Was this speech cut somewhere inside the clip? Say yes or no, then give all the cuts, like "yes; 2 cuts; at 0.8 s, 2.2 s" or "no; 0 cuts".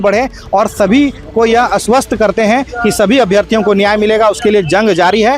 no; 0 cuts